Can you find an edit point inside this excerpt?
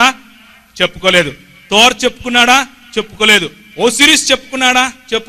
no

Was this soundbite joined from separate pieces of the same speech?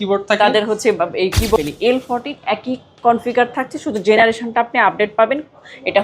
yes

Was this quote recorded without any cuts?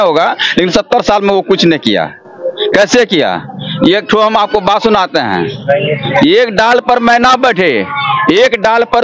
yes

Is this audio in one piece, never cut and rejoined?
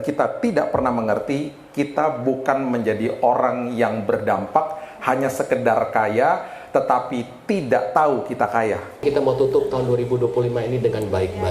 no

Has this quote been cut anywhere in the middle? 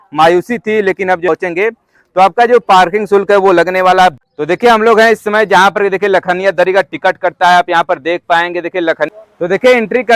yes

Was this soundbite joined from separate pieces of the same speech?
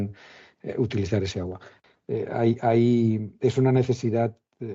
yes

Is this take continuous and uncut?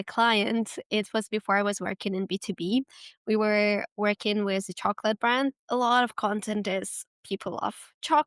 no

